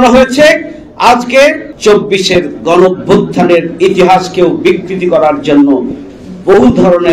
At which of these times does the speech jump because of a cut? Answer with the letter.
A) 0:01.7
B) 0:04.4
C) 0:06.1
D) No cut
A